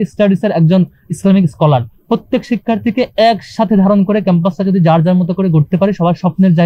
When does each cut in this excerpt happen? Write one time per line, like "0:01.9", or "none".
0:05.7

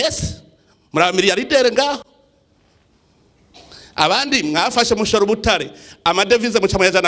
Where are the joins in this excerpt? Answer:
none

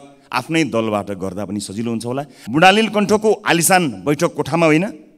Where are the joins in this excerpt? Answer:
0:02.3

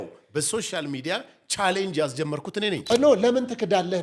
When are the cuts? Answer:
0:02.9

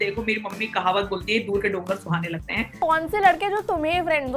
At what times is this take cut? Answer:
0:02.8

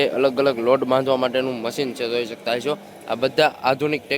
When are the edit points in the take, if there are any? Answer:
none

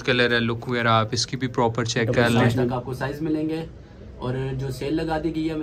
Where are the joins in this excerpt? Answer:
0:02.7

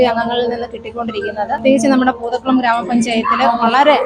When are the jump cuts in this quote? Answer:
0:01.6

